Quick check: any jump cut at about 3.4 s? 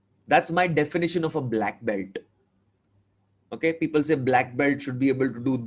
no; 0 cuts

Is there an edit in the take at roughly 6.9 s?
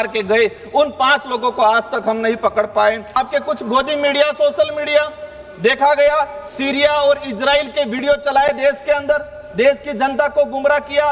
no; 1 cut; at 3.2 s

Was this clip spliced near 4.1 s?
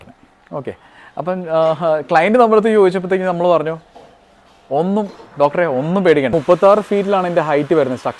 no; 1 cut; at 6.3 s

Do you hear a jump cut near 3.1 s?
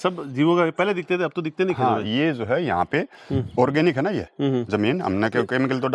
no; 0 cuts

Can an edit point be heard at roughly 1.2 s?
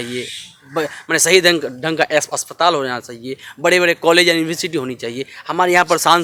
no; 0 cuts

